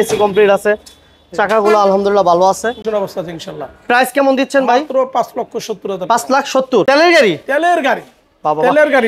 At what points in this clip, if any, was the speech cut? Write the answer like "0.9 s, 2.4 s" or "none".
2.9 s, 6.8 s